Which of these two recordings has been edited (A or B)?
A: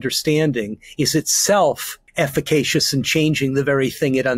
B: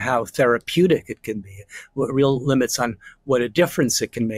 A